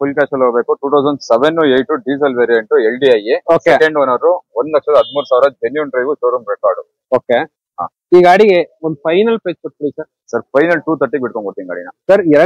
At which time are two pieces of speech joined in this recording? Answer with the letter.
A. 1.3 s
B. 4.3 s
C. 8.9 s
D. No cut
D